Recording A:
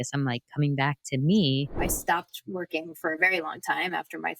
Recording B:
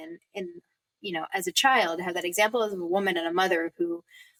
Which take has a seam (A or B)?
A